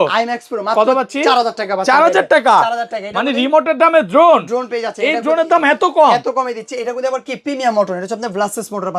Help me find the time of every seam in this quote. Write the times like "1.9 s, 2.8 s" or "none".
none

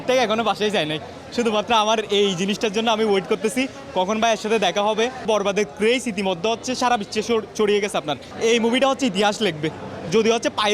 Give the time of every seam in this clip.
5.2 s, 8.2 s

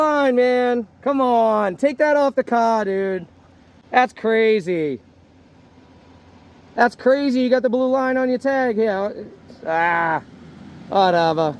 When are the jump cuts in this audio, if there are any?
none

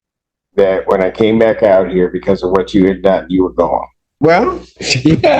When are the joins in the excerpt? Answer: 4.1 s

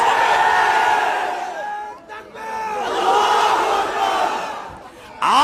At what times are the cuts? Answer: none

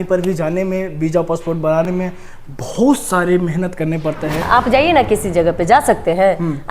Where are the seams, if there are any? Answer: 4.4 s

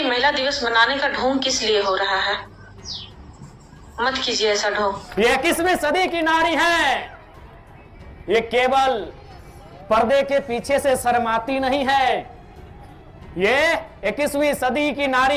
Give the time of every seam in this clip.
5.0 s

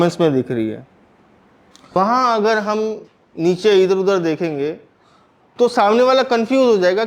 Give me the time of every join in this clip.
2.0 s

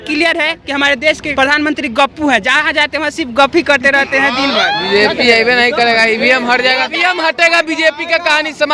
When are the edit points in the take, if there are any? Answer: 1.2 s, 4.8 s

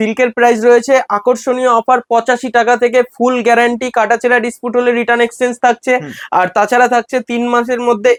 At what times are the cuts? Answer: none

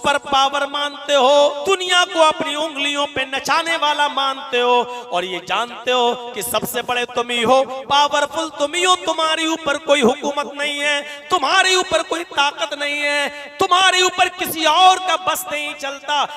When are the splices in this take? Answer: 1.6 s

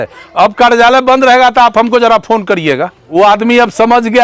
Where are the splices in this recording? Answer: 2.9 s

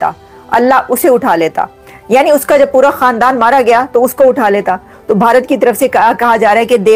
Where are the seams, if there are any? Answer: none

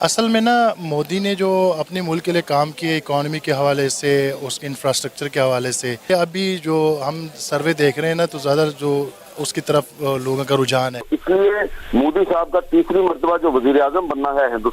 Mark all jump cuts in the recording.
6.1 s, 11.1 s

